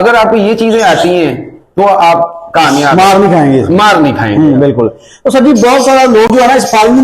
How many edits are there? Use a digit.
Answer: 0